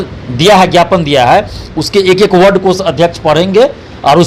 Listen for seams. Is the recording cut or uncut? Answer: uncut